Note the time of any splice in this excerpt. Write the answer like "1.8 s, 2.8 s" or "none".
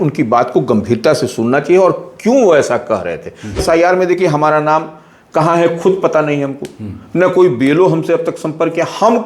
3.6 s